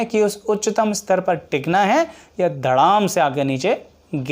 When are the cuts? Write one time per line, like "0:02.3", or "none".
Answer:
none